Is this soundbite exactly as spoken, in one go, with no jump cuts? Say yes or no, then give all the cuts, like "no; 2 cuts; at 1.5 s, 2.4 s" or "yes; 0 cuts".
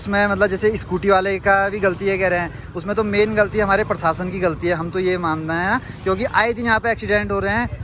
yes; 0 cuts